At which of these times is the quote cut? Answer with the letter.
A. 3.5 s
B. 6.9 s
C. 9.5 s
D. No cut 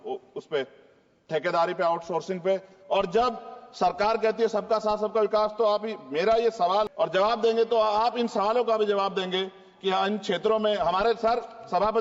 B